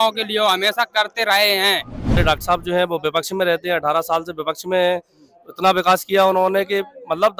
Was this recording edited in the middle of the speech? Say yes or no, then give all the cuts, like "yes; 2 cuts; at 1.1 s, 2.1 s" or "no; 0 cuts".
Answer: yes; 1 cut; at 2.2 s